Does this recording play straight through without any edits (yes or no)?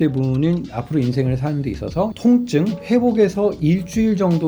no